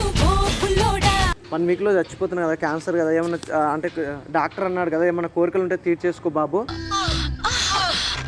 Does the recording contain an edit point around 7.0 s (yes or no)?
no